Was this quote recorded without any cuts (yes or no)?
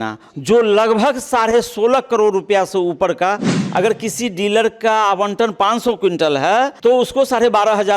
no